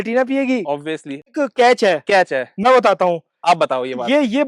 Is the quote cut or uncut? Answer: cut